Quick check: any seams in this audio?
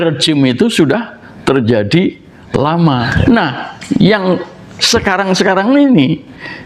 yes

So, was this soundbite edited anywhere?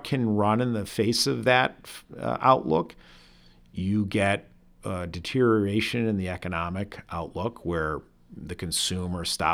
no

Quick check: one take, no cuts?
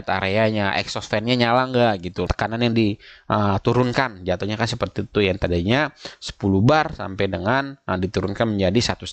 no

